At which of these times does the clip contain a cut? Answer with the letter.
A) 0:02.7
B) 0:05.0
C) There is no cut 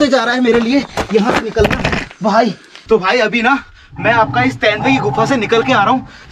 A